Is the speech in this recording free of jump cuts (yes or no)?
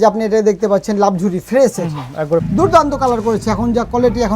no